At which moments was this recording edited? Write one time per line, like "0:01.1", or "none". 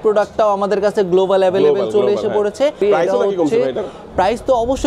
0:02.8